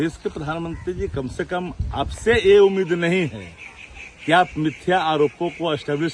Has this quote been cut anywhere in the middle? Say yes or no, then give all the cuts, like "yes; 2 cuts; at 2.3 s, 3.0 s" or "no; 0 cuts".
no; 0 cuts